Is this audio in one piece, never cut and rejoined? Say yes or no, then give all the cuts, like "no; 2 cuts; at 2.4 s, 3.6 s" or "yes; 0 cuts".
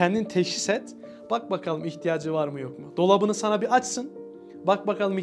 yes; 0 cuts